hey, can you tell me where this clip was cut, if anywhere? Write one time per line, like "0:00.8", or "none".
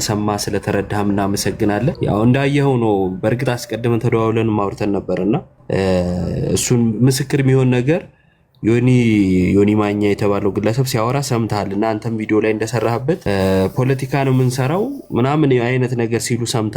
0:02.0
0:05.5
0:13.2